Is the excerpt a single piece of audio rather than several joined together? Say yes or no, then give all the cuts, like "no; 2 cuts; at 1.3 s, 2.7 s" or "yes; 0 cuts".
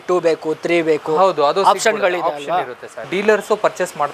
no; 1 cut; at 3.1 s